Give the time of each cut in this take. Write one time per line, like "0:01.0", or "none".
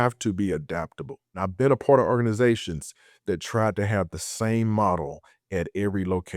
0:01.3